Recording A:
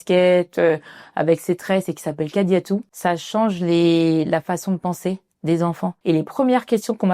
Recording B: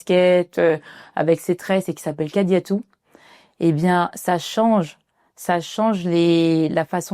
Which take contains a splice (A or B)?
A